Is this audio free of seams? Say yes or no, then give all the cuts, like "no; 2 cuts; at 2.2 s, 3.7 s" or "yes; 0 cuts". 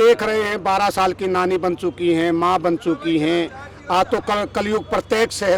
yes; 0 cuts